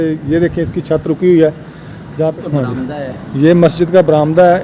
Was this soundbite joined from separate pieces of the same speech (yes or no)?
yes